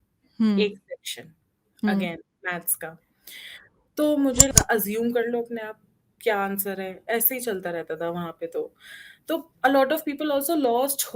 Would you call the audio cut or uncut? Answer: cut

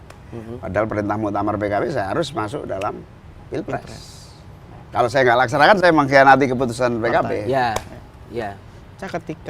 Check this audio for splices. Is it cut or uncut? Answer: uncut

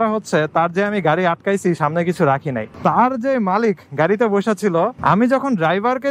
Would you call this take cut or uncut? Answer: cut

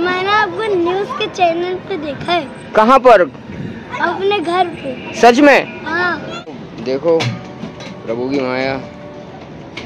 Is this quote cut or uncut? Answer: cut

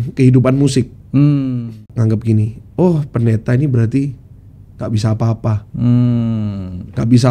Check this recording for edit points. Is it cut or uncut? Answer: cut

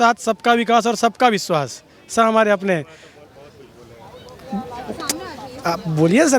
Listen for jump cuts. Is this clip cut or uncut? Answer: uncut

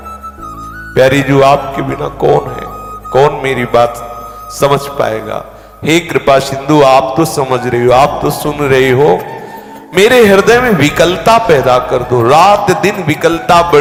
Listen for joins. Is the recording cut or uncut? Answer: uncut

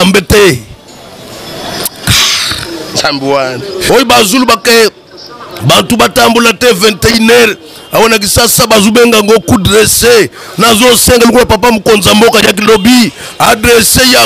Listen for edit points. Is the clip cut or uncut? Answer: cut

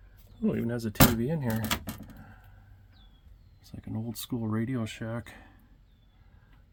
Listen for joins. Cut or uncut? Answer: uncut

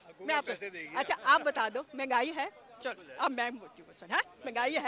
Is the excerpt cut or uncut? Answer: uncut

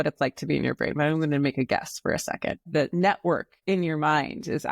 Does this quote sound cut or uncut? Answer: cut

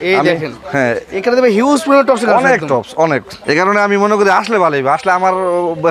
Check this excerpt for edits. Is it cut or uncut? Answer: cut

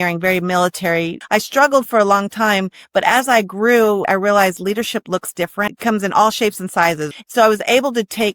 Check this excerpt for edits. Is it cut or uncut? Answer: cut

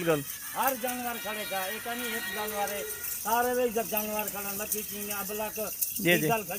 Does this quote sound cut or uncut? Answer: uncut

